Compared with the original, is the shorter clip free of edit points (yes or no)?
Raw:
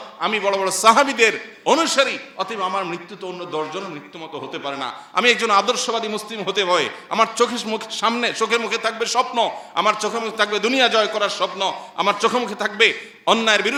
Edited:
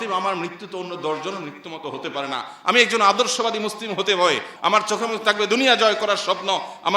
no